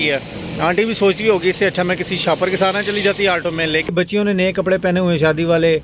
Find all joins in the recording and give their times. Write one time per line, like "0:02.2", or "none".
0:03.9